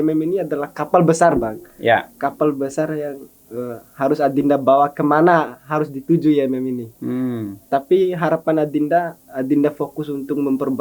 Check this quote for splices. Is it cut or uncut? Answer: uncut